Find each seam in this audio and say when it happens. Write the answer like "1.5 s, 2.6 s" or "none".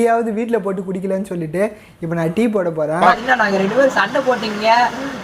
3.0 s